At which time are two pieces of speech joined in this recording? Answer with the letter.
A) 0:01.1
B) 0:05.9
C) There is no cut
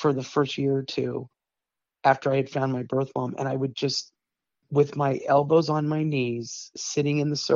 C